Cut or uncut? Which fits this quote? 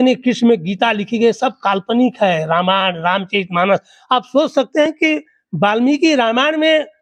uncut